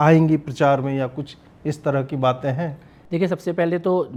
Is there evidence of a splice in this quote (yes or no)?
no